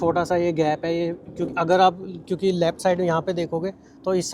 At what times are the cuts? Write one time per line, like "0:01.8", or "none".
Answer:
none